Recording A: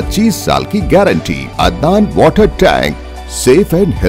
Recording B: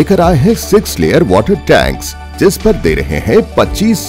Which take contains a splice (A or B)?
A